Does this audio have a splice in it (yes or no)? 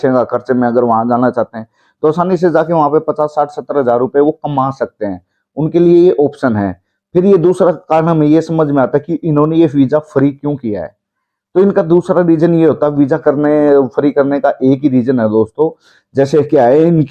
no